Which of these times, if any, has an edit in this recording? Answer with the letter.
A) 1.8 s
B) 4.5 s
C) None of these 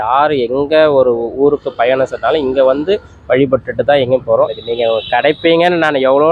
B